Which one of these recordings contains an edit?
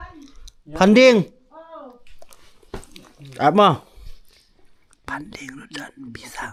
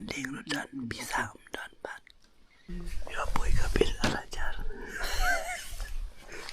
second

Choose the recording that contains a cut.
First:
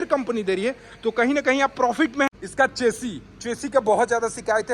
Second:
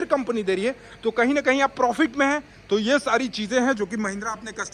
first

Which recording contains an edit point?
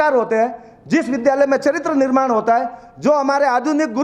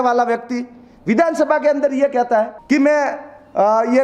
second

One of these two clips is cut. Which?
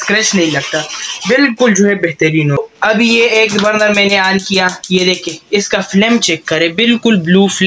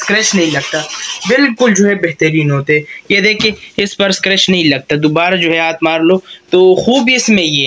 first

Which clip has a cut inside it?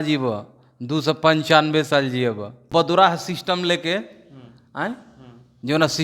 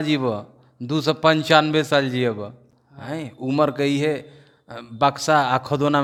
first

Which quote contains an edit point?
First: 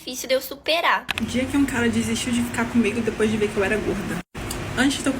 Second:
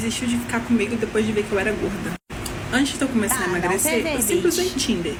first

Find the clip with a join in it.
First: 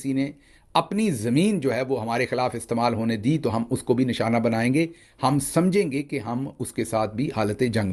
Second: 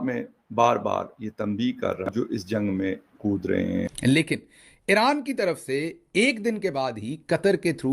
second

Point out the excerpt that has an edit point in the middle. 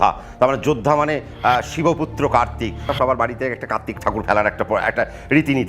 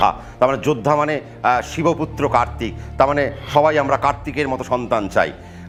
first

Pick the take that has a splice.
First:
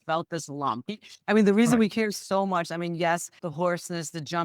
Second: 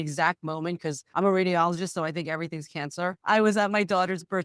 first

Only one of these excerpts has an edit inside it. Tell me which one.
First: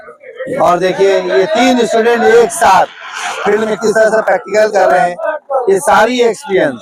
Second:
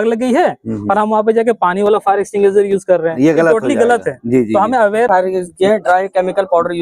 second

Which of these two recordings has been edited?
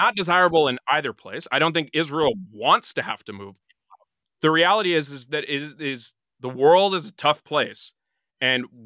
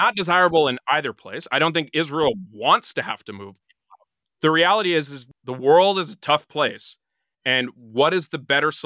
second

